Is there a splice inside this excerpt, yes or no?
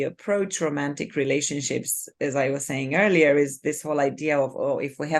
no